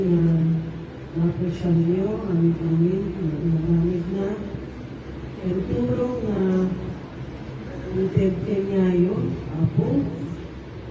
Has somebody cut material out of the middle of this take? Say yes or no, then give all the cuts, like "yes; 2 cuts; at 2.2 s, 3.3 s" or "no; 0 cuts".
no; 0 cuts